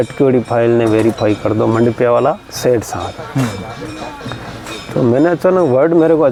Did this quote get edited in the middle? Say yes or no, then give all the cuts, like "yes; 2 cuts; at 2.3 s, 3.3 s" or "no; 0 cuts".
no; 0 cuts